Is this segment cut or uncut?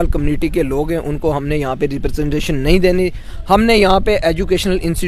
uncut